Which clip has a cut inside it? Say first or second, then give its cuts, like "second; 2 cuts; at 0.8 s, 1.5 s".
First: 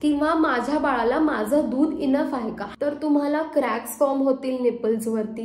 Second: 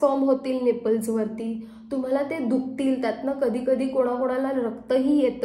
first; 1 cut; at 2.6 s